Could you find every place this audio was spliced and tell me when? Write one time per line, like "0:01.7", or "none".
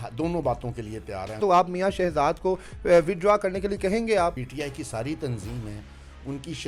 0:01.4
0:04.4